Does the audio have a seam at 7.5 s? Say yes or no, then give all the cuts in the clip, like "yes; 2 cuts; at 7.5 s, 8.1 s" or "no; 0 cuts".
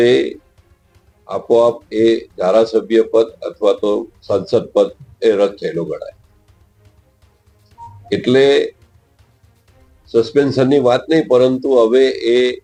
no; 0 cuts